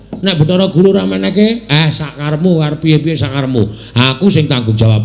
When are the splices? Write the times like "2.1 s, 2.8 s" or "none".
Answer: none